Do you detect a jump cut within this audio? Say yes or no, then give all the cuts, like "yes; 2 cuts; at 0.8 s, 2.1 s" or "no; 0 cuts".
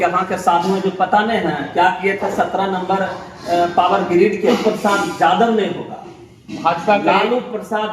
yes; 1 cut; at 4.5 s